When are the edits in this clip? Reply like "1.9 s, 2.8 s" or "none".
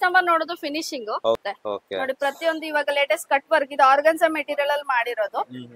1.4 s